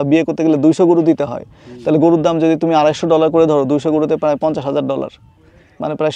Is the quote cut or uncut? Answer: uncut